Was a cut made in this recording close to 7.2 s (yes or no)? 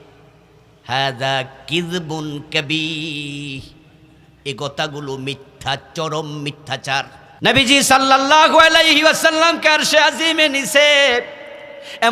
yes